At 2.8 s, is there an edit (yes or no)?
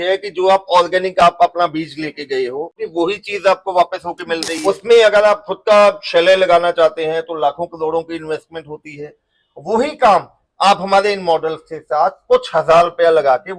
yes